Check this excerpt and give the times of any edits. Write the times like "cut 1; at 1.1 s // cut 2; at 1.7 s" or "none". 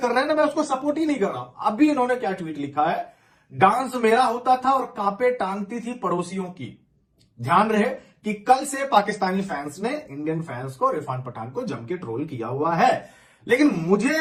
none